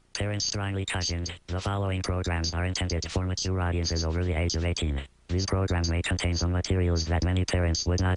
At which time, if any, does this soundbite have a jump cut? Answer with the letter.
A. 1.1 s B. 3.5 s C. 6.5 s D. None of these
A